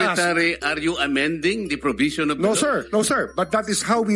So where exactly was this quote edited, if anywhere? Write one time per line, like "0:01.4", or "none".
0:02.8